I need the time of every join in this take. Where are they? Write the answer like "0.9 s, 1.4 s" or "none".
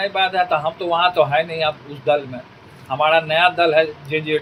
none